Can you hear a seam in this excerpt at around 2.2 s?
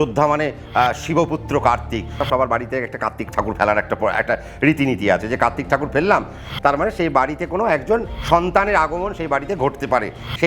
yes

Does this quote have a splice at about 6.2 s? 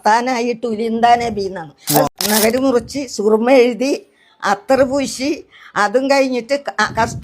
no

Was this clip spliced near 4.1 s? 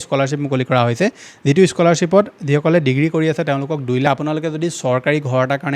yes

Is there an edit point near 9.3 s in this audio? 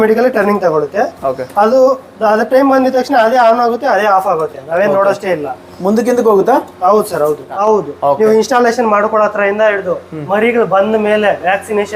no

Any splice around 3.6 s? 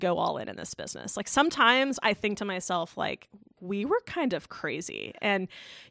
yes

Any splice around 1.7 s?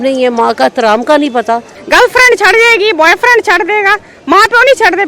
yes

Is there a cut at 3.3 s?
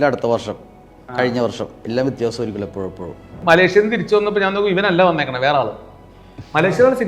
yes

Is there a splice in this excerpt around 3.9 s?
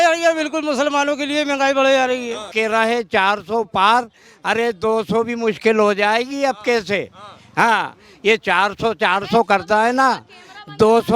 no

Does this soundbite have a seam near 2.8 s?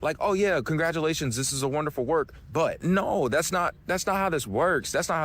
yes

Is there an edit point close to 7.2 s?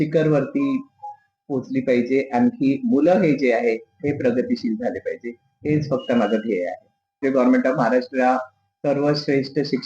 yes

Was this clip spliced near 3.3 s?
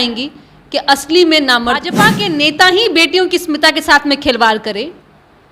no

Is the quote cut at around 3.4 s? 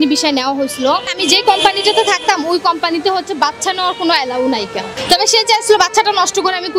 no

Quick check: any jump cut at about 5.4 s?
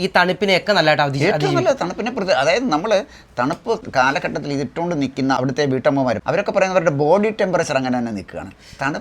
yes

